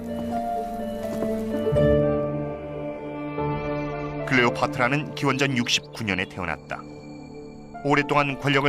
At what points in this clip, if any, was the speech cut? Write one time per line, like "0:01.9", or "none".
0:01.3